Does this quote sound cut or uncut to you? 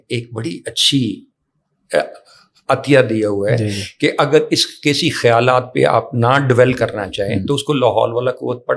uncut